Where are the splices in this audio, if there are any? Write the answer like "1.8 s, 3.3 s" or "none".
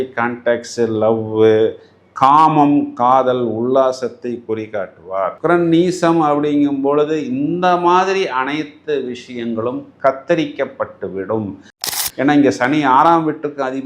11.9 s